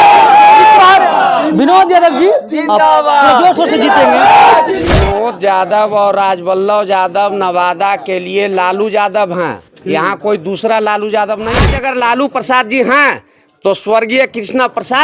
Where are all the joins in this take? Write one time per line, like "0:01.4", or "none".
0:05.0
0:11.7